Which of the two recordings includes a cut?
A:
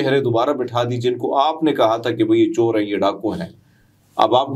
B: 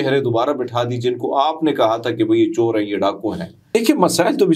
B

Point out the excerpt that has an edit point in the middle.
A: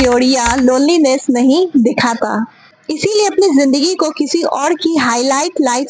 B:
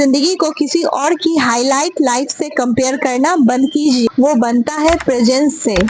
B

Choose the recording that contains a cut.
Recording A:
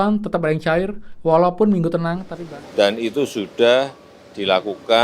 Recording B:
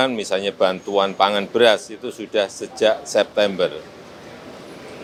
A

